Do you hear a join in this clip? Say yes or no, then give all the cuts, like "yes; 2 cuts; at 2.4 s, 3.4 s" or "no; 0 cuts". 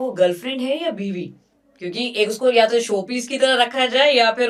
no; 0 cuts